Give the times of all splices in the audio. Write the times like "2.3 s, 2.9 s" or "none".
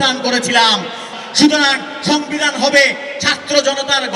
1.1 s